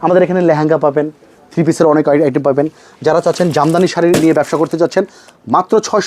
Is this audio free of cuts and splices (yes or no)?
yes